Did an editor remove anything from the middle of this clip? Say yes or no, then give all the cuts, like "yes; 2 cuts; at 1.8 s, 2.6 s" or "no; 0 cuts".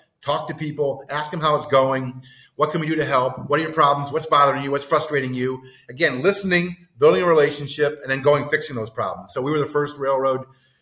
no; 0 cuts